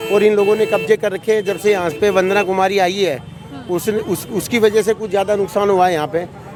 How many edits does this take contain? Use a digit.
0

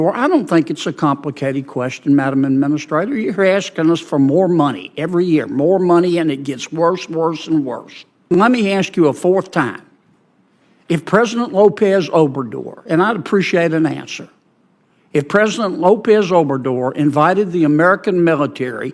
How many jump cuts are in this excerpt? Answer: 1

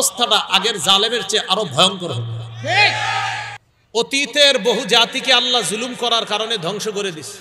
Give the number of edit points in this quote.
1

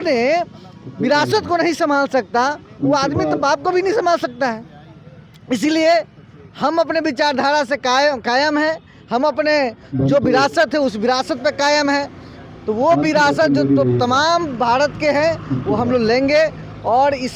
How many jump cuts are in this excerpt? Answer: 0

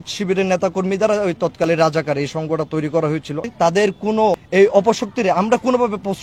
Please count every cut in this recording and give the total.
1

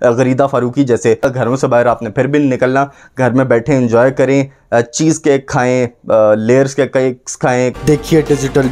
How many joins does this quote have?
2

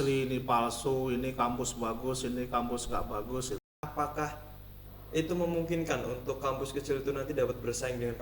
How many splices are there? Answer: 1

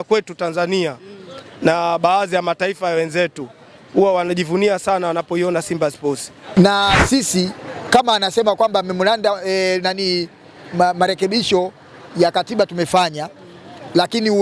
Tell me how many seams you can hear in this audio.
1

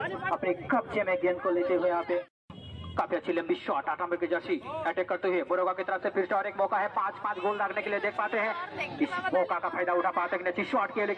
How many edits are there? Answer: 1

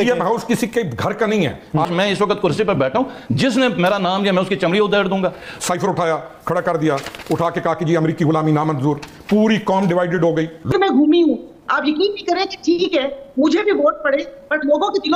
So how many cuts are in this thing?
3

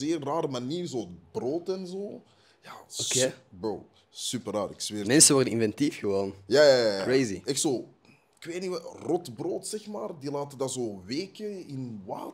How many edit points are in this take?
0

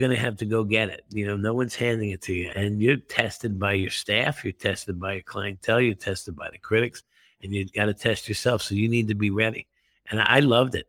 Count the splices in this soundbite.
1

